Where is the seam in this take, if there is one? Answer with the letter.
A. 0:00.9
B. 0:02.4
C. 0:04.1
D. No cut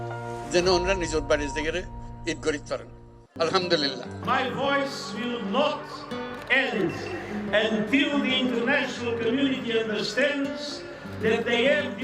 C